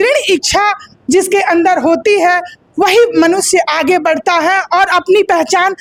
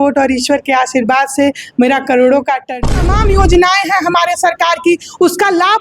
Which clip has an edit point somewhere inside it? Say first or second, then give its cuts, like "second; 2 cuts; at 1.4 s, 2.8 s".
second; 1 cut; at 2.8 s